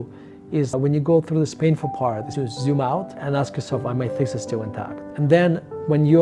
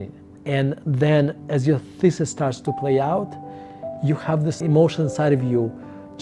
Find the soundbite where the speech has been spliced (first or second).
first